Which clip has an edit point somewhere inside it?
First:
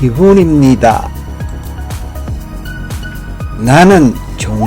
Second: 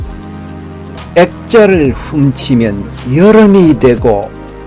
first; 2 cuts; at 1.3 s, 3.5 s

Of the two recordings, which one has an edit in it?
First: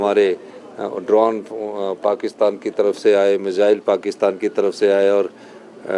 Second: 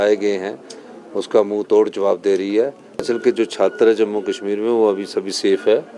second; 1 cut; at 3.0 s

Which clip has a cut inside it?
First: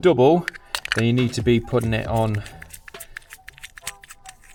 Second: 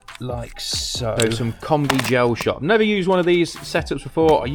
second; 1 cut; at 1.2 s

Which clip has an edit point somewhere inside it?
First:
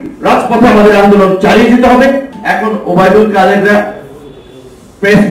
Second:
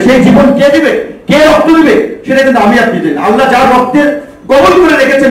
first; 1 cut; at 2.4 s

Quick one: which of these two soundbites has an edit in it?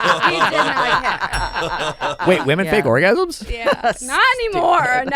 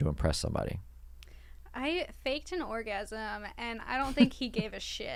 first; 1 cut; at 2.2 s

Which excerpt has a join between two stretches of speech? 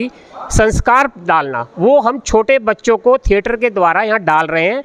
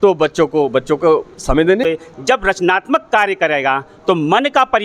second; 1 cut; at 1.8 s

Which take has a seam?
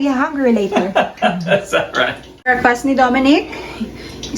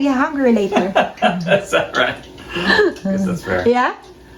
first; 1 cut; at 2.5 s

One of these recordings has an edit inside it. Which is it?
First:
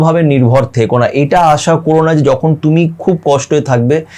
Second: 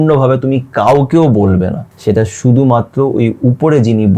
second; 1 cut; at 1.9 s

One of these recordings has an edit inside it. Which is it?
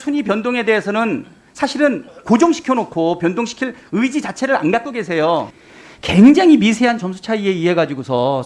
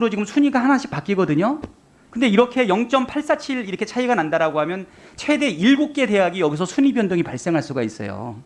first; 1 cut; at 5.5 s

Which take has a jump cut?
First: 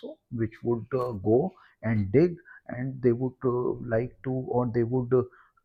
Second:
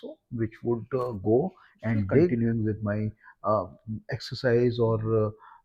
second; 1 cut; at 2.3 s

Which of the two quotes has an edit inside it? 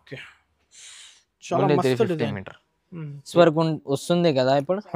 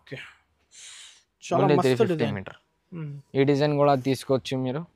first; 1 cut; at 3.3 s

